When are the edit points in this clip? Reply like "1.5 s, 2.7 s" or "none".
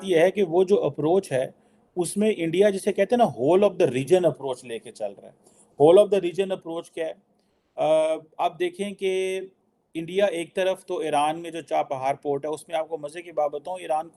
none